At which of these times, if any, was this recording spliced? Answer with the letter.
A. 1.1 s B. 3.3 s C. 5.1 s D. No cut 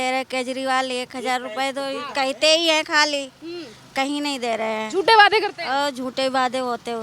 D